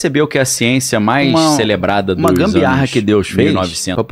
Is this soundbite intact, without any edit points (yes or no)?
no